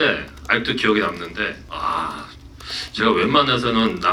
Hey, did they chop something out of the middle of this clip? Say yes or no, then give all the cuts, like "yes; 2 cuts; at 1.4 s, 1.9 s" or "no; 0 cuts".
yes; 1 cut; at 1.6 s